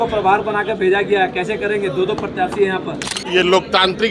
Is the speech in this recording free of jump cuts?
no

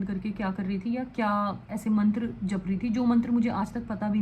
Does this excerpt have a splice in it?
no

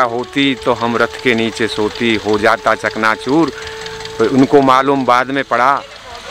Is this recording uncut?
yes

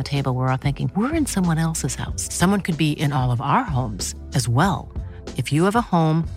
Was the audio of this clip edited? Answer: no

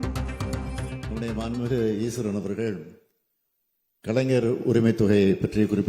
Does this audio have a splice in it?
yes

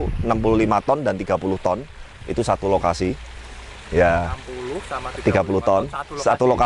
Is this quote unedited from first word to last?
yes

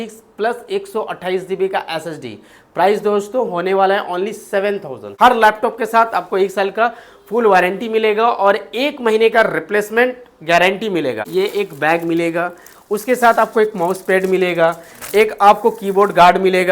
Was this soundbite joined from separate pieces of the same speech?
yes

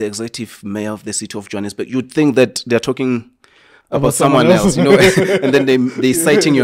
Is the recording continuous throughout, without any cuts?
yes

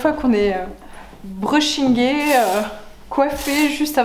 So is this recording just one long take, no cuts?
yes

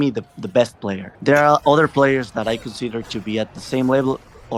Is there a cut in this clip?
no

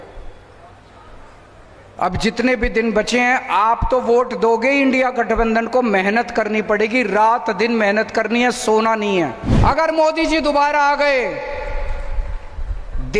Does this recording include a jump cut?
yes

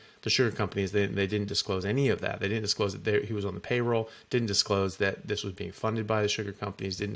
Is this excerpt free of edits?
yes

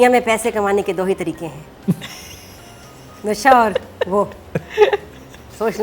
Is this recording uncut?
yes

